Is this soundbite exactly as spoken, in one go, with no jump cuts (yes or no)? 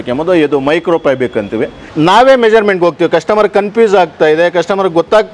no